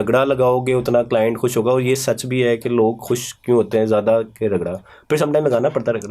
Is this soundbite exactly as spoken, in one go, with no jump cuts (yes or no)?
yes